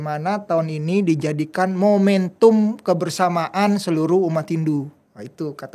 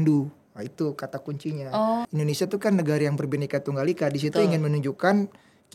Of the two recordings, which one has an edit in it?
second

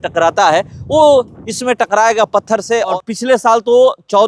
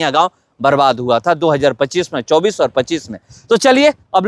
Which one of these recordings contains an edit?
first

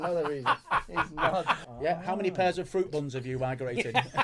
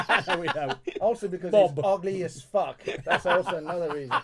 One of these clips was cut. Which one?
first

